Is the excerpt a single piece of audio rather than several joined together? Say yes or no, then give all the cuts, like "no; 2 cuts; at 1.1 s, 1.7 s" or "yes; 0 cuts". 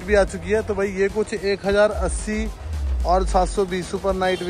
yes; 0 cuts